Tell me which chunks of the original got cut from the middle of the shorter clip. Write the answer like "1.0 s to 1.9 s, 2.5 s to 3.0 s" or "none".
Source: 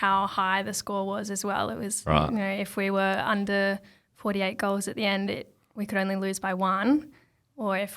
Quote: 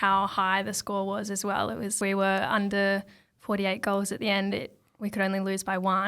2.0 s to 2.7 s